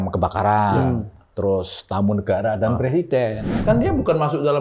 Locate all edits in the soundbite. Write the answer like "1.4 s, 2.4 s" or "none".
3.5 s